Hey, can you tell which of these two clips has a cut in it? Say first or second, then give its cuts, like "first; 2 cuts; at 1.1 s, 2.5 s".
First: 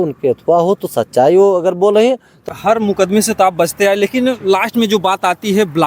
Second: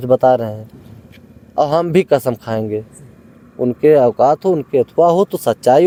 first; 1 cut; at 2.5 s